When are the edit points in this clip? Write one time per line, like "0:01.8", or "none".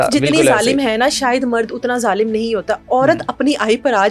none